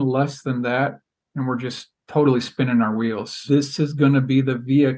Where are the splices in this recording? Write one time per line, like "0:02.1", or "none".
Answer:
0:03.4

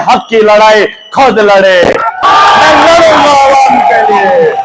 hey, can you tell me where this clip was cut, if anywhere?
0:02.5

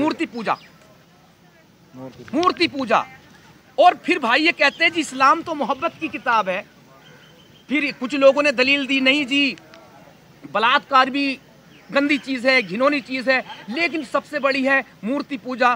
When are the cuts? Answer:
none

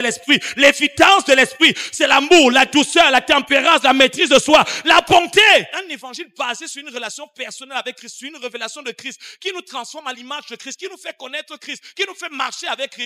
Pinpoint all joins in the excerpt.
0:05.7

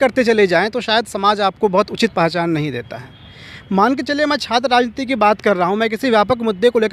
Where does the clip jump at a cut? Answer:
none

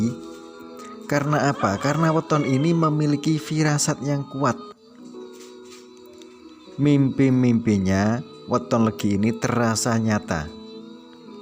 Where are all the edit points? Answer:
0:04.6
0:06.7

